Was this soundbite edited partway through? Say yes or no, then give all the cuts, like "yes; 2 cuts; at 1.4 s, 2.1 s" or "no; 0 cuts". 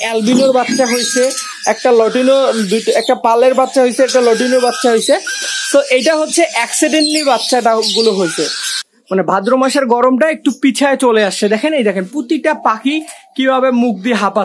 yes; 1 cut; at 8.8 s